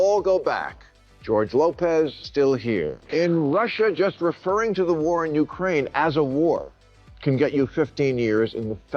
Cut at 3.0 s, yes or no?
yes